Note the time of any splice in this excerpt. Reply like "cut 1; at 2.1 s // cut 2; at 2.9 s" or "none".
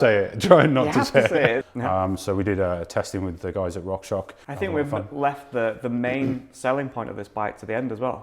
cut 1; at 1.6 s // cut 2; at 4.4 s